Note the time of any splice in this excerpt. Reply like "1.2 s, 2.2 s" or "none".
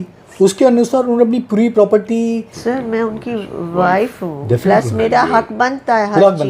2.5 s

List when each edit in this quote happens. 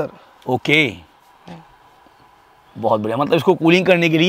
none

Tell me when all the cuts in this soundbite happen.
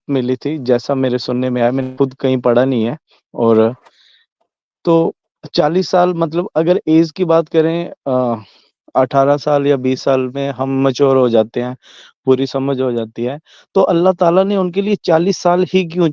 none

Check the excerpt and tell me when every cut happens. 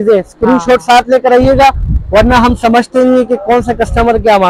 none

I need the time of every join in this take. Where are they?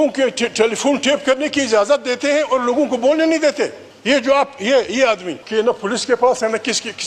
3.9 s, 5.3 s

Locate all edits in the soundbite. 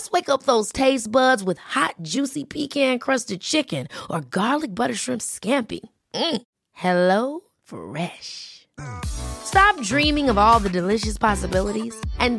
none

